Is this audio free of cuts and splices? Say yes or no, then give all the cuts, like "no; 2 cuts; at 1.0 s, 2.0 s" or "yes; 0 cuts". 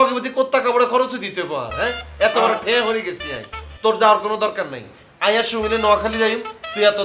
yes; 0 cuts